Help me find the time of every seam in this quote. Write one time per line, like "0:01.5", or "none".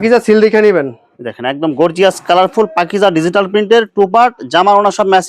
none